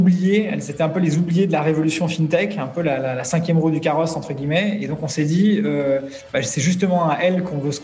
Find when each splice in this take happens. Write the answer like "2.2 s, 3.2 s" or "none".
none